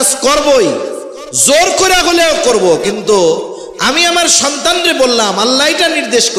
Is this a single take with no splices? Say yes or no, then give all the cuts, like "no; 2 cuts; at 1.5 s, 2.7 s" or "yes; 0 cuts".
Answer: yes; 0 cuts